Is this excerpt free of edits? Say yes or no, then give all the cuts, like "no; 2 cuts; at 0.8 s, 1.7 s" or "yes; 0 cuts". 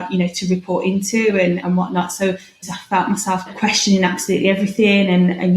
no; 1 cut; at 2.7 s